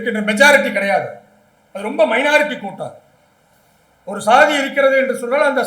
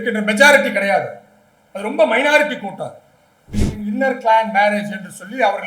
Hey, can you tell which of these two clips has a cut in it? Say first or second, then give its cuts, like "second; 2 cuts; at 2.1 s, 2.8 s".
second; 1 cut; at 3.5 s